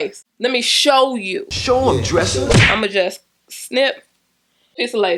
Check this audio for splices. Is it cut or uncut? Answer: uncut